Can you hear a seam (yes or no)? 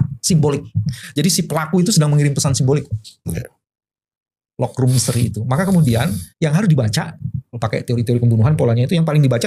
no